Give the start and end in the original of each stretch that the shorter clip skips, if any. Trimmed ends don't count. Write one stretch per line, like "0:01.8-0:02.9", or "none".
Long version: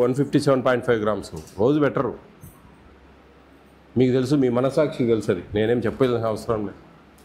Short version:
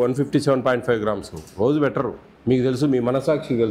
0:02.3-0:03.8